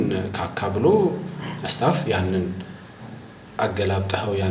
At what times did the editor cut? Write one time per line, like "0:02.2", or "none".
none